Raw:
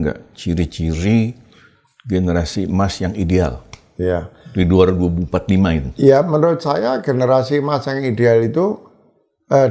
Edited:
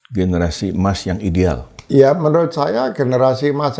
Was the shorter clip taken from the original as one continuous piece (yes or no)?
no